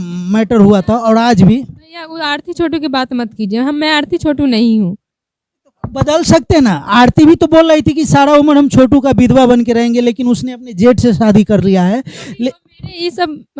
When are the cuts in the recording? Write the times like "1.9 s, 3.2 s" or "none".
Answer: none